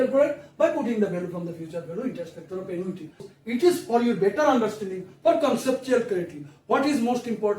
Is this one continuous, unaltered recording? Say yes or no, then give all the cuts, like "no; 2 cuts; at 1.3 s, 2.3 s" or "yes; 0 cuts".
no; 1 cut; at 3.3 s